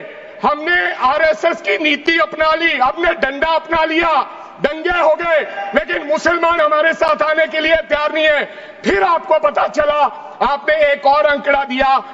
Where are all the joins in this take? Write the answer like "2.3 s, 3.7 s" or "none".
none

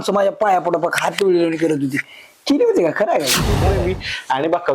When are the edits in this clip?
3.6 s

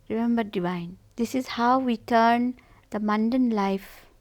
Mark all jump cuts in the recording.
1.0 s

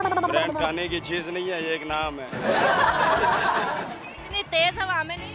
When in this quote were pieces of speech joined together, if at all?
4.1 s

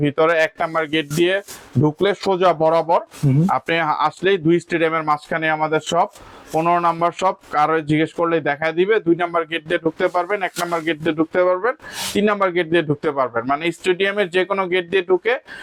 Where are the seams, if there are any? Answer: none

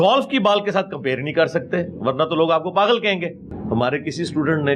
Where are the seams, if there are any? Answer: 3.5 s

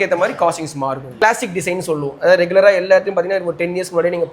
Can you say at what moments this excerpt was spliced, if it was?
1.1 s

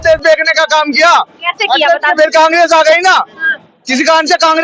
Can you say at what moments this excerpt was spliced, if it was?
none

